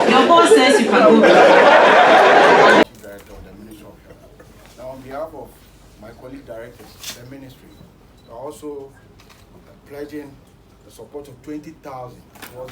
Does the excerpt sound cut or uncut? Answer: cut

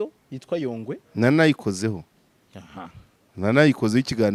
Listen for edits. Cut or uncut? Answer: uncut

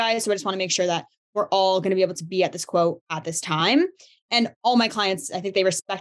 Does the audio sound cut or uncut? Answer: uncut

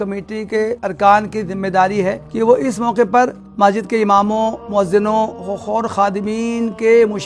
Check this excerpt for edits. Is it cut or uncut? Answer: cut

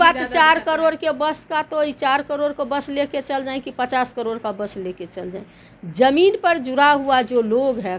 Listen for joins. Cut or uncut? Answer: uncut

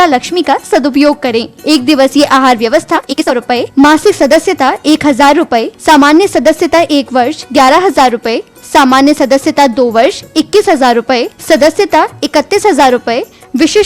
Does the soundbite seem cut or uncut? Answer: cut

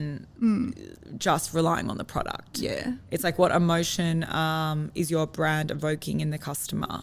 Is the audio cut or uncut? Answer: uncut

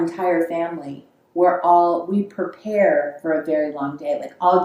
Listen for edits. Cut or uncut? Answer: uncut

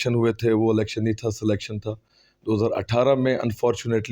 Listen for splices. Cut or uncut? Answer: uncut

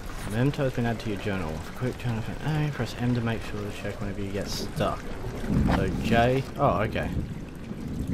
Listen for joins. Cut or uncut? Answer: cut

